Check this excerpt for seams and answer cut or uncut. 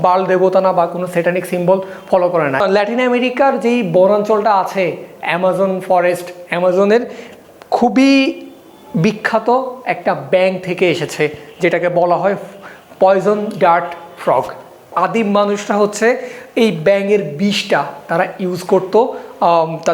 cut